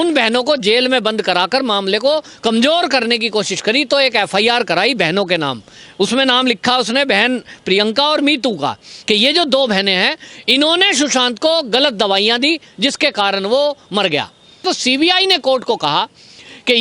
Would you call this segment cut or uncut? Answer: cut